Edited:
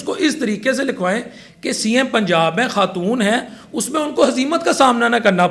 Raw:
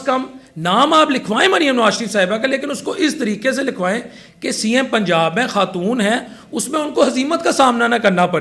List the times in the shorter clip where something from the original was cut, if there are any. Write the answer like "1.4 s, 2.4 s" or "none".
none